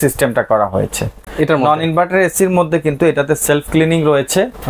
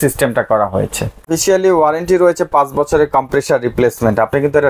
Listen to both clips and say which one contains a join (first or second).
second